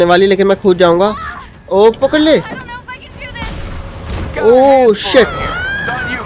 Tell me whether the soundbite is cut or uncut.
uncut